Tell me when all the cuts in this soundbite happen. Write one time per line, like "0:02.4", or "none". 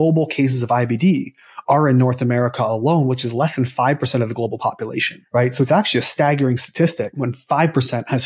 0:05.1
0:07.4